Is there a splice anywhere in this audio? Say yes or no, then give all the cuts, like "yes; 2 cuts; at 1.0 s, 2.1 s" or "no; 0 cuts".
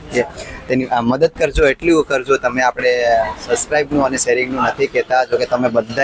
no; 0 cuts